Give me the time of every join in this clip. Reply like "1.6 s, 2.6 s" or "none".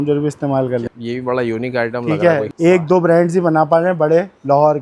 0.9 s, 2.5 s